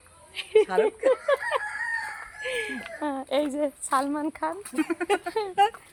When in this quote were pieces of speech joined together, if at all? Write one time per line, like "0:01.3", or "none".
none